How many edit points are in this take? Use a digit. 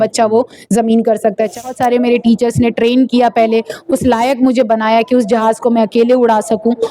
1